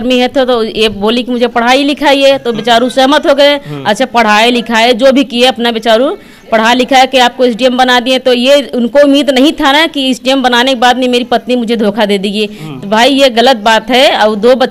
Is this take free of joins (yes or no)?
yes